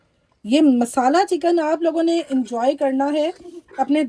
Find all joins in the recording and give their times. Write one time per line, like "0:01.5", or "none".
none